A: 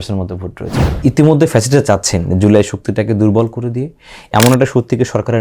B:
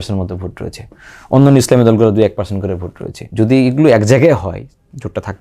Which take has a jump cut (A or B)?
A